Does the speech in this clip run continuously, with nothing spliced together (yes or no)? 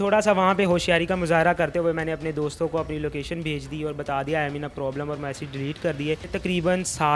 no